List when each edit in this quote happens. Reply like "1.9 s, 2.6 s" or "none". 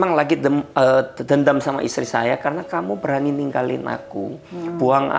none